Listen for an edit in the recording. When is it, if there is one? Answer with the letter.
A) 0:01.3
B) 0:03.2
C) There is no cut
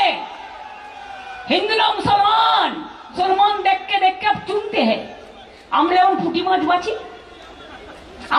B